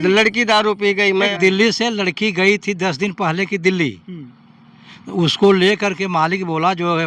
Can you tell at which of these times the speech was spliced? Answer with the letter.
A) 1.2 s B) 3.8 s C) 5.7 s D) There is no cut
A